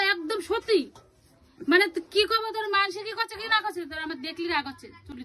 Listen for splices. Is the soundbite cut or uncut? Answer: uncut